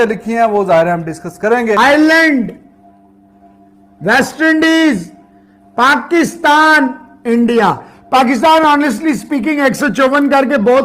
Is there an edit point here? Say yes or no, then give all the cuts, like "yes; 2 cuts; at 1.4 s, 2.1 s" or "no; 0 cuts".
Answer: yes; 1 cut; at 1.8 s